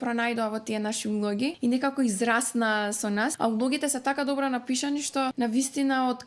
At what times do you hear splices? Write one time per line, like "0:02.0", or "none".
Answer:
0:01.6
0:03.3
0:05.3